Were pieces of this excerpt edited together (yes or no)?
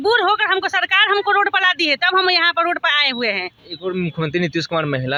no